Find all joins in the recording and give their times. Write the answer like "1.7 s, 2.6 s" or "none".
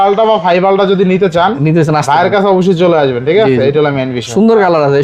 none